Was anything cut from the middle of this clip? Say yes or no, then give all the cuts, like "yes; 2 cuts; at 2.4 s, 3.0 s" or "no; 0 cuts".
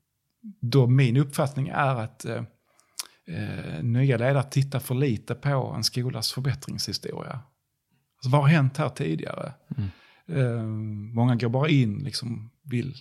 no; 0 cuts